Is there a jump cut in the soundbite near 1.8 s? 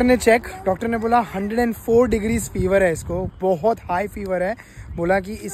no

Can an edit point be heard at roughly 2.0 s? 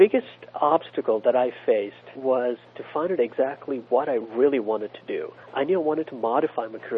yes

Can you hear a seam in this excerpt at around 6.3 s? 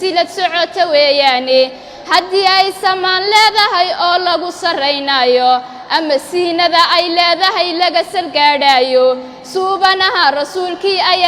no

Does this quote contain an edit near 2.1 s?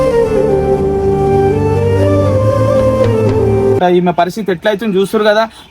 no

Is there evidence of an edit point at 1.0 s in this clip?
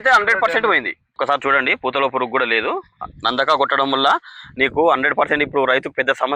yes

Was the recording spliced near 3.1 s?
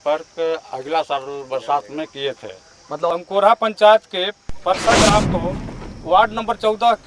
yes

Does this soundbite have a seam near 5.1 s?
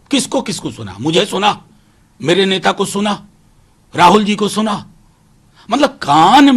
no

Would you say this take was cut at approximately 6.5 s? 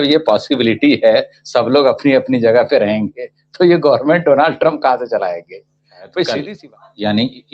yes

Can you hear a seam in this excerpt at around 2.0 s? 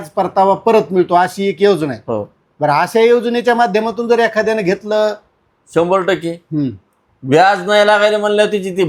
no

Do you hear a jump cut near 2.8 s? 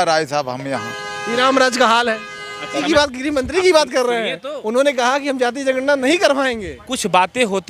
yes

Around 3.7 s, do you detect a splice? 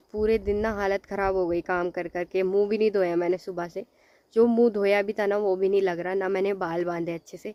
no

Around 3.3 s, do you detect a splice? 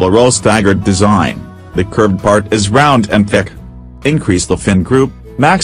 yes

